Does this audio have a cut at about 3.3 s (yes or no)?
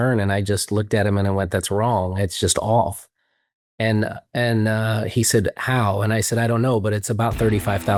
no